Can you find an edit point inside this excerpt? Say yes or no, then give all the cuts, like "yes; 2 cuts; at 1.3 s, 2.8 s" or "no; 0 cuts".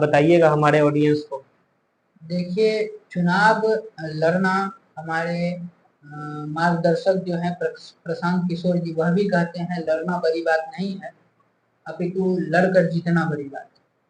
no; 0 cuts